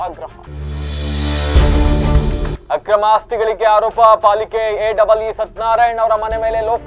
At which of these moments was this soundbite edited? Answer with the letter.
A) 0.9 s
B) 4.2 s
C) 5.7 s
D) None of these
D